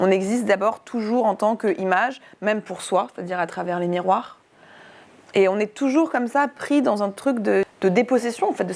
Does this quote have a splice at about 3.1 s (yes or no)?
no